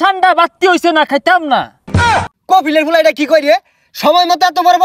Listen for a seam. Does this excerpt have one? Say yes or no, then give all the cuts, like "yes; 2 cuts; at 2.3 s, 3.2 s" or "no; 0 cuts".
yes; 1 cut; at 2.0 s